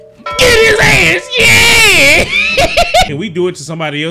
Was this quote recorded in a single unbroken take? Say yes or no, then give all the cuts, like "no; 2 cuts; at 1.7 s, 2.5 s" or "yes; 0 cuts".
no; 1 cut; at 3.1 s